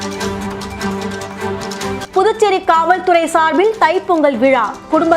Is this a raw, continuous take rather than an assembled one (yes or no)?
no